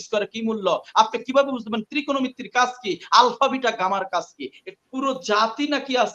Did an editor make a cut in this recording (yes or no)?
yes